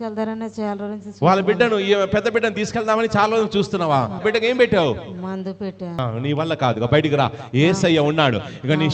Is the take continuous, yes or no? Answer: no